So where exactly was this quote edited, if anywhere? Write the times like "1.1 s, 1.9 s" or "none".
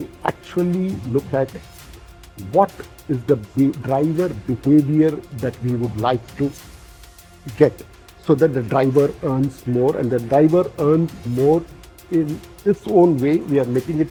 none

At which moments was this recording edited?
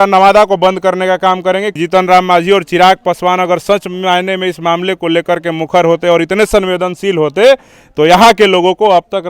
1.8 s

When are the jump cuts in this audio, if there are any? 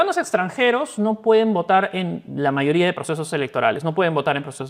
none

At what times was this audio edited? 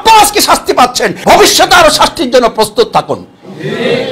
1.1 s

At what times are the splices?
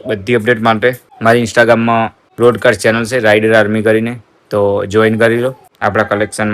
1.1 s, 2.2 s, 5.7 s

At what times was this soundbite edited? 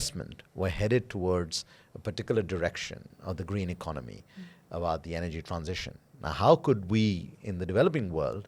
none

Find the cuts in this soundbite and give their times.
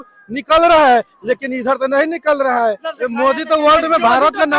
2.9 s

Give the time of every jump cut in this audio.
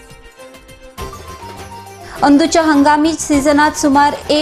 1.9 s

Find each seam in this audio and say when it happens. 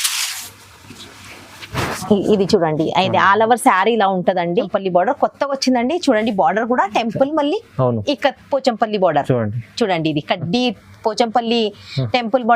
4.6 s

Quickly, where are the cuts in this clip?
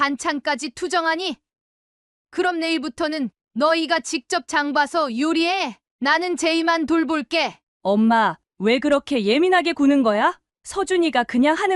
7.6 s

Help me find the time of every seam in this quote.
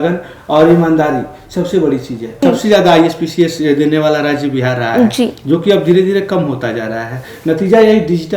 2.4 s

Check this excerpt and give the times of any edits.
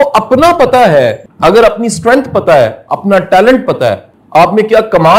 1.3 s, 4.1 s

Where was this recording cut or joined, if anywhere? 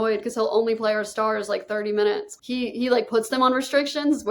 2.3 s

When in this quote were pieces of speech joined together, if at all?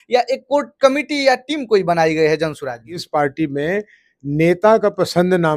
3.0 s

